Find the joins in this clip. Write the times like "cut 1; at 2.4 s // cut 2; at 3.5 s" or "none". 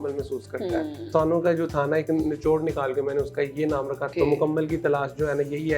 cut 1; at 1.1 s // cut 2; at 4.1 s